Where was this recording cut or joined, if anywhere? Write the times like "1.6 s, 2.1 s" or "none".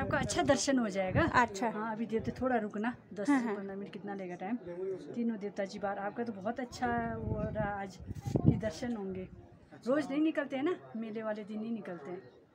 none